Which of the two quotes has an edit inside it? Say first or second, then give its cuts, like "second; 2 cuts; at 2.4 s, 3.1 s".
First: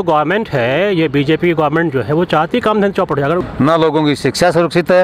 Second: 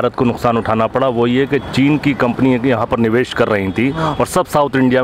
first; 1 cut; at 3.4 s